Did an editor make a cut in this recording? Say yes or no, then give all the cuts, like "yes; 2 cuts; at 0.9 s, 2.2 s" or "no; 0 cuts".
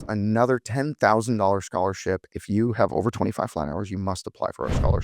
yes; 1 cut; at 2.3 s